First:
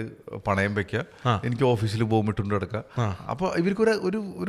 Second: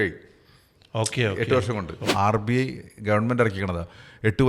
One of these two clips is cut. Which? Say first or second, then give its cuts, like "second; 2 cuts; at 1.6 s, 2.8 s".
second; 1 cut; at 2.1 s